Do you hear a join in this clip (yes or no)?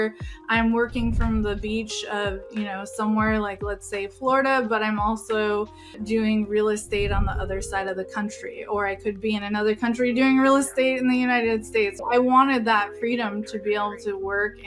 yes